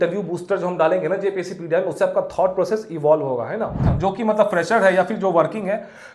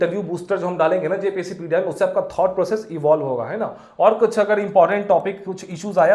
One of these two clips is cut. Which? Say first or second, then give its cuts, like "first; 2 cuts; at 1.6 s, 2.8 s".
first; 1 cut; at 3.8 s